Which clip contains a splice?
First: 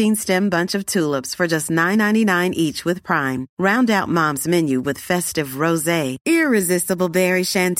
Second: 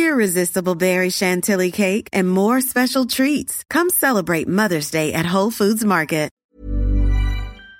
second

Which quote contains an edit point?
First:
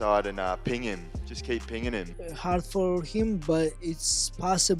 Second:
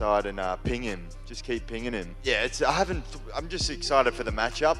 first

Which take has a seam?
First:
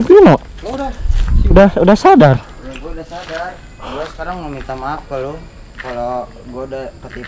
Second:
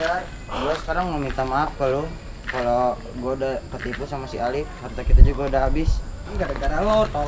second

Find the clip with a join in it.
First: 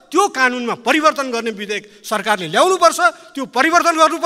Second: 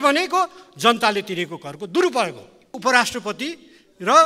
second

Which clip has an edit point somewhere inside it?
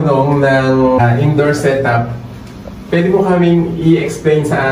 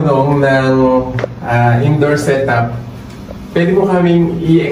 first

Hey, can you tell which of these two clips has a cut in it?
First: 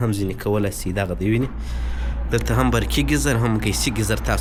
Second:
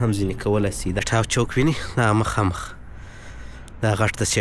second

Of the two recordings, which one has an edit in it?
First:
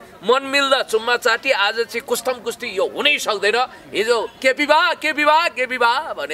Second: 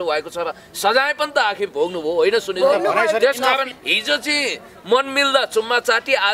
second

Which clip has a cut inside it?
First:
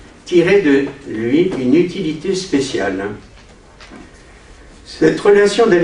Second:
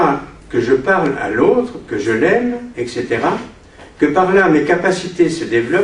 second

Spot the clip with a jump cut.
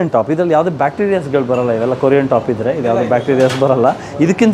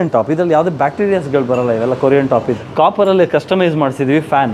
second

